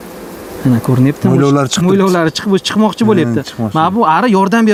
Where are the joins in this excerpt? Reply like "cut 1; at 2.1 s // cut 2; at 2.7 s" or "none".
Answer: none